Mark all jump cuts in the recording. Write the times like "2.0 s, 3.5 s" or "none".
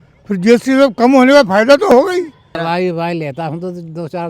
2.6 s